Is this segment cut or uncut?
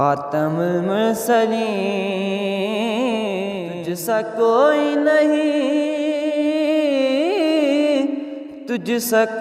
cut